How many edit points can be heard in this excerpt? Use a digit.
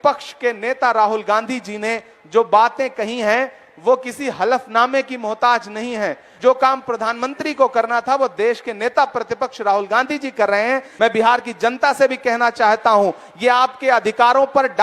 2